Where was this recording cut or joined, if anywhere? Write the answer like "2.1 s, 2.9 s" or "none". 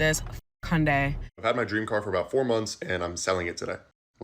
1.3 s